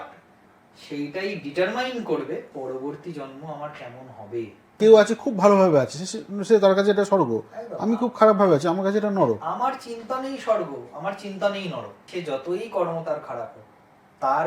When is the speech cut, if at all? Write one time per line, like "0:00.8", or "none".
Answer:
0:02.5
0:04.7
0:12.0